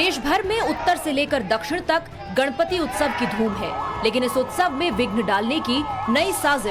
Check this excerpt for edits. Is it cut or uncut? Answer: uncut